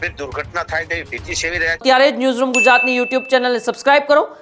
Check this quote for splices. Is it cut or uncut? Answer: cut